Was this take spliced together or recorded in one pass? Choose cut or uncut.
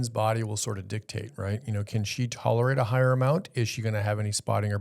uncut